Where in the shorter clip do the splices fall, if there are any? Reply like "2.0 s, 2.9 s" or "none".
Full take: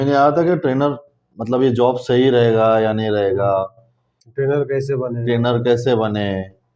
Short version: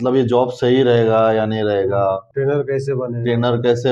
2.3 s